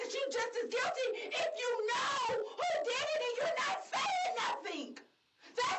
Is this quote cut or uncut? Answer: uncut